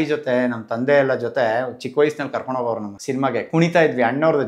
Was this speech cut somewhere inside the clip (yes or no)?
yes